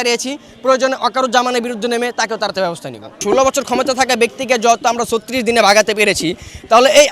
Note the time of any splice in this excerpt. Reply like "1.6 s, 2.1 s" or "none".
3.2 s